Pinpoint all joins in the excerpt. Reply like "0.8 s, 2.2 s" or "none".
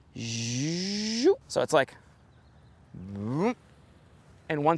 1.5 s